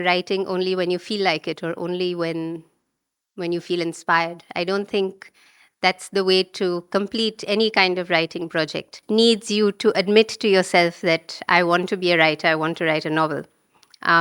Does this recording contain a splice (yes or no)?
yes